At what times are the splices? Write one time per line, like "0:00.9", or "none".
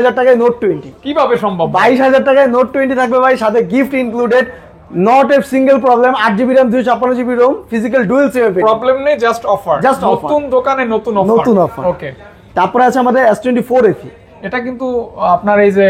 none